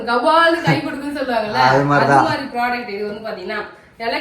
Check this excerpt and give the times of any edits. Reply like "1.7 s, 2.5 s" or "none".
none